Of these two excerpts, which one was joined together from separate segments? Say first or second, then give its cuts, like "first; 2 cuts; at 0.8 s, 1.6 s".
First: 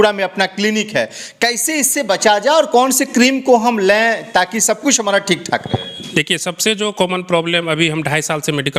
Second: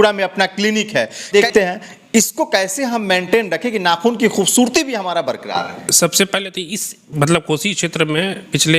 second; 1 cut; at 1.3 s